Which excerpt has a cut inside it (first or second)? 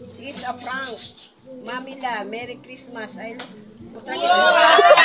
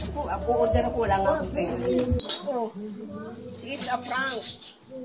second